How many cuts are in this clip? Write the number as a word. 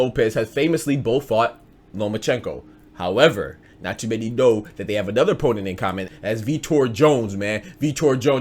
one